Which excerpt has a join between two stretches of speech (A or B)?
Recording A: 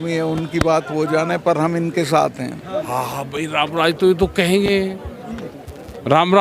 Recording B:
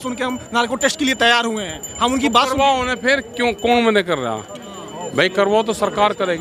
A